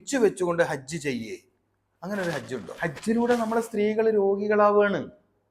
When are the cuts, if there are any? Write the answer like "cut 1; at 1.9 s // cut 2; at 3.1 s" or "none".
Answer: cut 1; at 2.7 s